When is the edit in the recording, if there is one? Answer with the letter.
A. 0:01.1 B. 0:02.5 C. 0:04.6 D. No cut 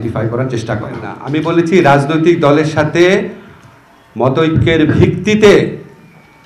A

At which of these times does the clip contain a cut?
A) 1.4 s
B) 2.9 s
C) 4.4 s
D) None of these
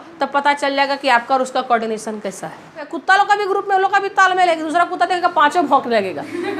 B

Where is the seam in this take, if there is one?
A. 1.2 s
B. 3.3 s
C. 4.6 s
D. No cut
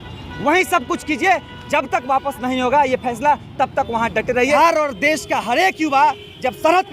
C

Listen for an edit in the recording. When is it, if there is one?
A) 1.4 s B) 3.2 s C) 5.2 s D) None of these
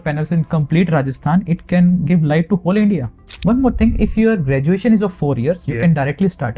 B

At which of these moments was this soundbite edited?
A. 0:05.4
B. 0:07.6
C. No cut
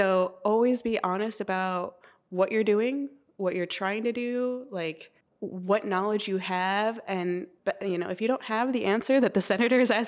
C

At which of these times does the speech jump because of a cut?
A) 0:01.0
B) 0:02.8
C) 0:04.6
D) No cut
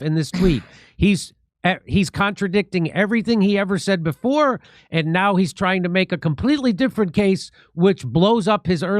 A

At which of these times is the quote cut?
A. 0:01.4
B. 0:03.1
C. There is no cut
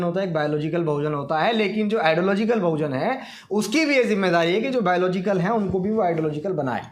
C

